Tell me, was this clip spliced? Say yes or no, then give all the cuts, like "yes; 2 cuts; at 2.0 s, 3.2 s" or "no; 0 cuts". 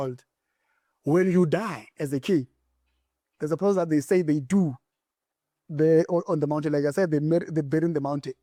no; 0 cuts